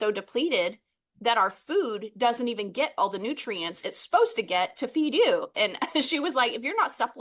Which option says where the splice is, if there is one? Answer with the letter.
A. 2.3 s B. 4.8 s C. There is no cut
C